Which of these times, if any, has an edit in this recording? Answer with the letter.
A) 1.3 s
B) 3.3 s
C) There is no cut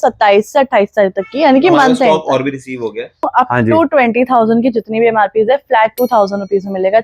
B